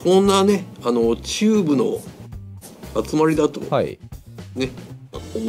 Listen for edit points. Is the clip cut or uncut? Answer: uncut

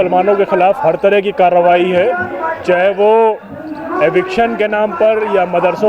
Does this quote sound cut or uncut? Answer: uncut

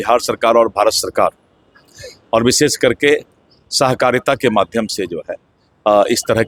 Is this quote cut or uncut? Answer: uncut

